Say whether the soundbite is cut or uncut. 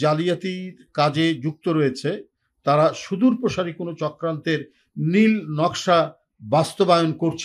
uncut